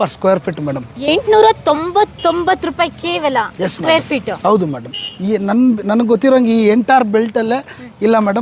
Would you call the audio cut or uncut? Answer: uncut